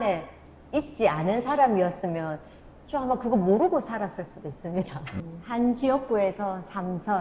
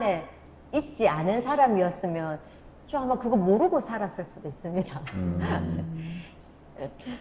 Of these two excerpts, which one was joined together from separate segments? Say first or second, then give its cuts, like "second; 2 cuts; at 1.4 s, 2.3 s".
first; 1 cut; at 5.2 s